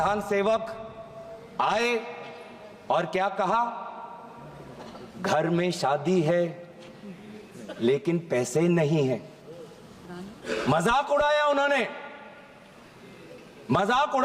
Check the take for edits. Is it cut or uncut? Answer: uncut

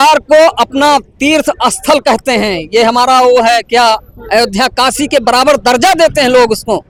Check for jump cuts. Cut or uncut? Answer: uncut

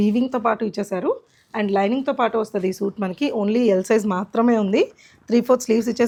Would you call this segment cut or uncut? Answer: uncut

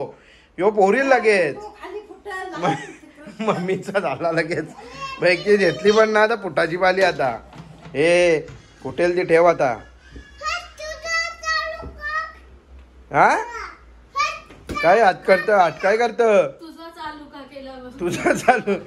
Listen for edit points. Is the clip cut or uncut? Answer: uncut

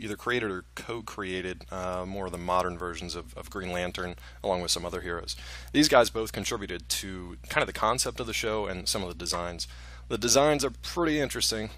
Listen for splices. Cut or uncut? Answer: cut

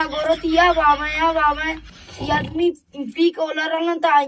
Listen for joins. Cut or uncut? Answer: uncut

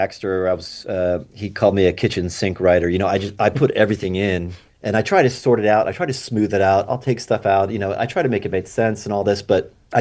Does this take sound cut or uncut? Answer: uncut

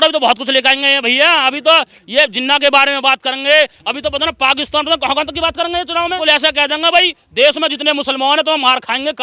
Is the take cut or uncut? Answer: cut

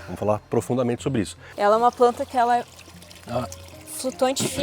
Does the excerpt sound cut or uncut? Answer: cut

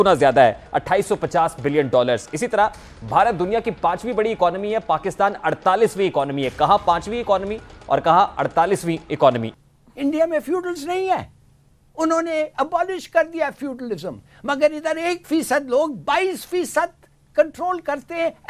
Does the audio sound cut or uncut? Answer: cut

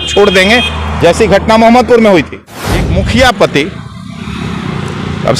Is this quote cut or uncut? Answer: cut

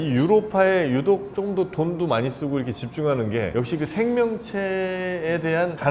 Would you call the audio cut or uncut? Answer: uncut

